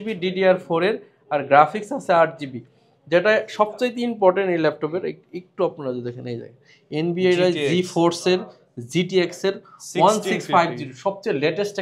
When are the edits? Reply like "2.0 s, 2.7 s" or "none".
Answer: none

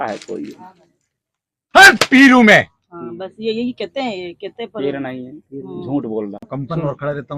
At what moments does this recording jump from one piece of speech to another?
6.5 s

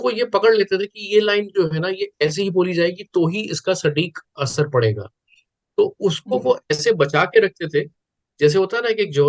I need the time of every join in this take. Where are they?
none

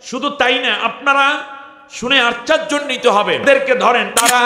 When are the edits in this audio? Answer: 3.4 s

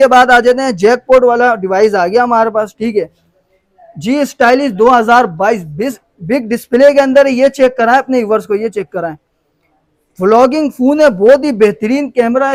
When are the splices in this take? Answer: none

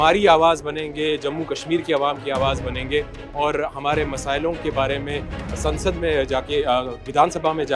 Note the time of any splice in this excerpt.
none

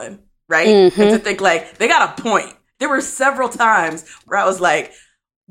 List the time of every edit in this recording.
2.7 s, 4.2 s

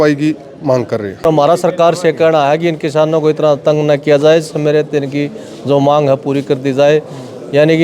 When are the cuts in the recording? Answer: 1.2 s

